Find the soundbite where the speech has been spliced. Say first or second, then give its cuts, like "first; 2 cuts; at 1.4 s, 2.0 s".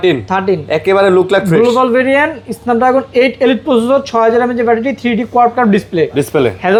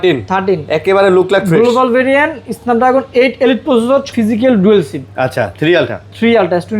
second; 1 cut; at 4.1 s